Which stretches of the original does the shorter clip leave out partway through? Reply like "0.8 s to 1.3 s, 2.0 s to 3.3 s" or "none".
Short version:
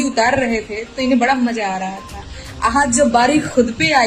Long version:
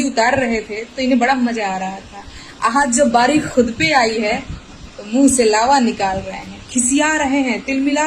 none